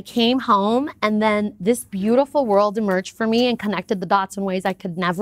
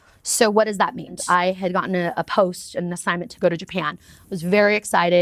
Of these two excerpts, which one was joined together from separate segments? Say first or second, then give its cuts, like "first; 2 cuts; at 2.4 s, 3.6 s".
second; 1 cut; at 1.2 s